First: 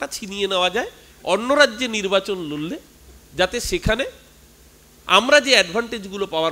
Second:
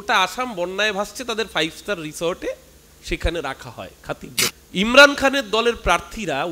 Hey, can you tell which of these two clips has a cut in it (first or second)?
second